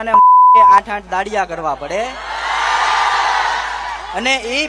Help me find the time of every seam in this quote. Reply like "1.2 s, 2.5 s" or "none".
0.9 s